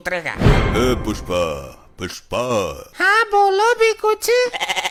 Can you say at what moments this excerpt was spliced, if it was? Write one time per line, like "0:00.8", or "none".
none